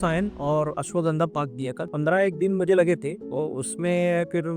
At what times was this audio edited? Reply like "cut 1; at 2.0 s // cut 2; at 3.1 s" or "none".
cut 1; at 1.8 s // cut 2; at 3.2 s